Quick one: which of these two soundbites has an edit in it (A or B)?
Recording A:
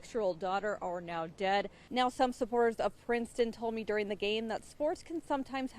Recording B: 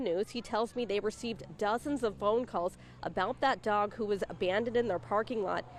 A